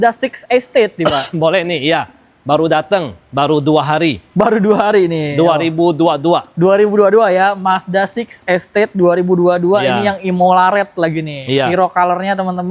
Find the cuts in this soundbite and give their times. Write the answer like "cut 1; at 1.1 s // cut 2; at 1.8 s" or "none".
none

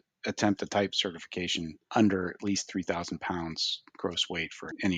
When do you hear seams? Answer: none

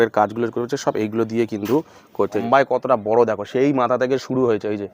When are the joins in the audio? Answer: cut 1; at 2.4 s

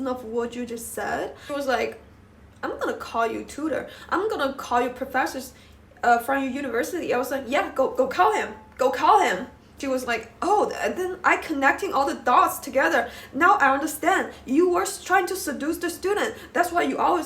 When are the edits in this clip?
cut 1; at 1.4 s // cut 2; at 9.9 s

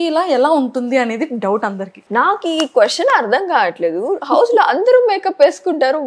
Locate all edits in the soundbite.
cut 1; at 2.0 s

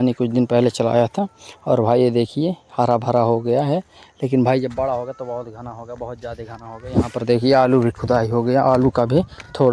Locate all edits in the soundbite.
none

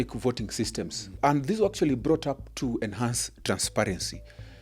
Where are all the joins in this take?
cut 1; at 1.0 s

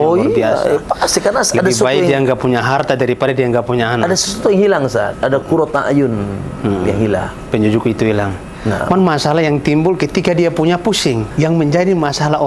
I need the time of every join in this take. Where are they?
cut 1; at 11.3 s

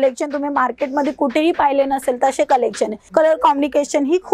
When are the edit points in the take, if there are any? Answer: cut 1; at 3.0 s

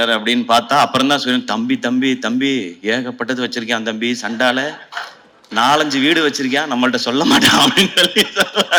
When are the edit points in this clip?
none

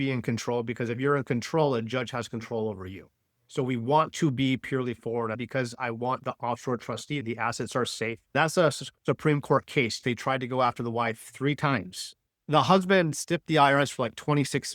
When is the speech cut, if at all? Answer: cut 1; at 5.4 s // cut 2; at 7.2 s // cut 3; at 8.3 s // cut 4; at 10.0 s

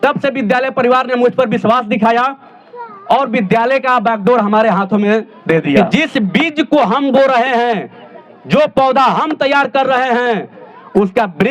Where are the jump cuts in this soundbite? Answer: cut 1; at 5.8 s

